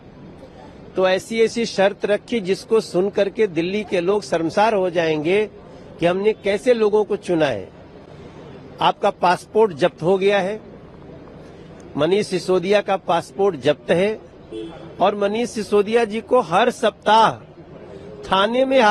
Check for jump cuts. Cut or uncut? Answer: uncut